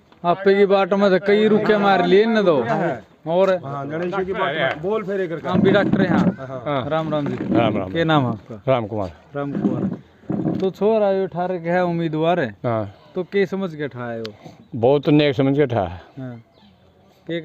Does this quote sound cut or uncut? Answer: uncut